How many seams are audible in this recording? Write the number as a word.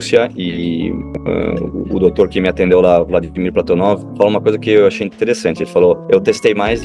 three